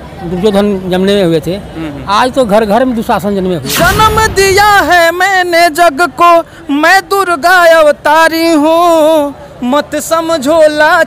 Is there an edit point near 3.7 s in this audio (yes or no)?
yes